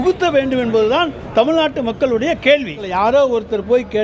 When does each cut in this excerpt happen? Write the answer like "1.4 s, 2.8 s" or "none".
2.8 s